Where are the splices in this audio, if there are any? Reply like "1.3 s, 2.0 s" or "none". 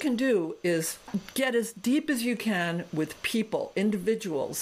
1.1 s